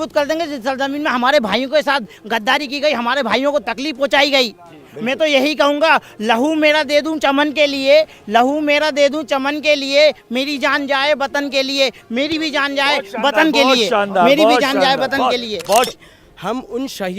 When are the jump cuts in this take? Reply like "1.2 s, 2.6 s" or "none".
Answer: 15.9 s